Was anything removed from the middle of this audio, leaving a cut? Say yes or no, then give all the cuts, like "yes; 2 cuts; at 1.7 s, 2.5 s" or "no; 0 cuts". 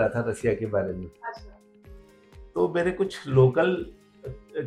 no; 0 cuts